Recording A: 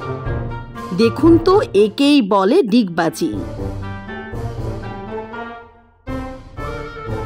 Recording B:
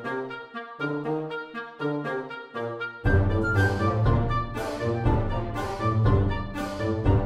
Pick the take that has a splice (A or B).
A